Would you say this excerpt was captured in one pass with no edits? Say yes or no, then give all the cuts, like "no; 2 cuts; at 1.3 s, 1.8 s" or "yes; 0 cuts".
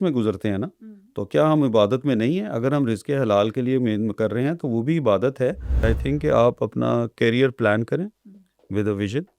no; 1 cut; at 5.7 s